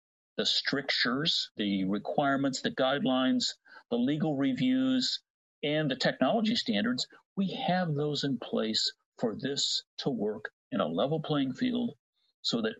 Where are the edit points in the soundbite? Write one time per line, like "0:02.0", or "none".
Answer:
0:01.6